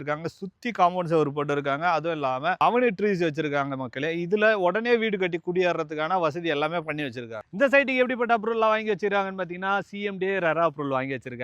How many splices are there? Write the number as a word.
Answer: zero